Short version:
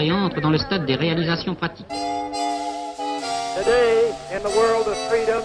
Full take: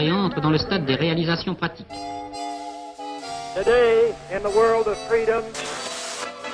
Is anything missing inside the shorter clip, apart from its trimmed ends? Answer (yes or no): no